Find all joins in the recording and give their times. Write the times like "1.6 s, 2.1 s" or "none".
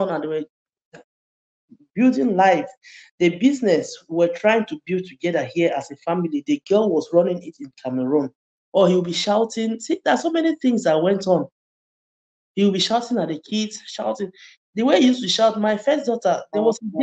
8.6 s